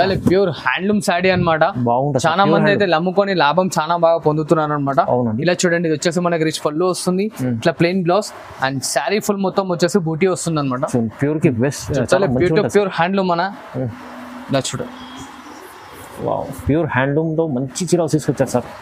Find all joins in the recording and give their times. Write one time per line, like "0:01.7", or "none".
none